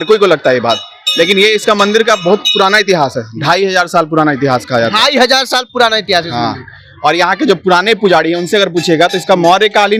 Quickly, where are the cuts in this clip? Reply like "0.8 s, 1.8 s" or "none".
none